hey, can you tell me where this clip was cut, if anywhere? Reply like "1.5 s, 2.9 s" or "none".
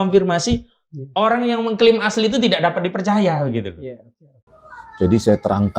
none